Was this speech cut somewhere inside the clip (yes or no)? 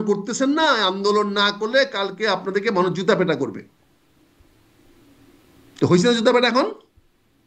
no